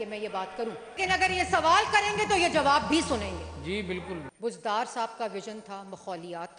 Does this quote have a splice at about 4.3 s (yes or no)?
yes